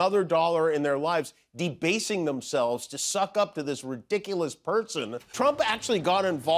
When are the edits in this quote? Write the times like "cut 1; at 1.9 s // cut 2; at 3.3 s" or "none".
cut 1; at 5.3 s